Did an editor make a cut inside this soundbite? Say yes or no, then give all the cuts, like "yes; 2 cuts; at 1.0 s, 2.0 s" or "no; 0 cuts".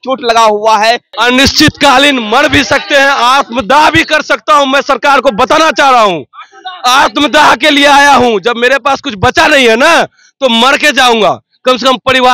yes; 1 cut; at 1.1 s